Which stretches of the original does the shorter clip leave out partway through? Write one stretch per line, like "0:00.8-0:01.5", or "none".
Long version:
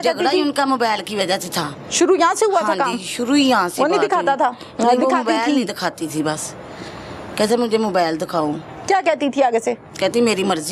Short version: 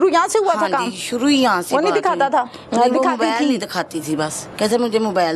0:06.5-0:07.2